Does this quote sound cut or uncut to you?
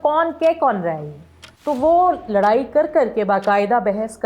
cut